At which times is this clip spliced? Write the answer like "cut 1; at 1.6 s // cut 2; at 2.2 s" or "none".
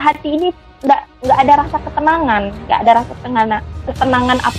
none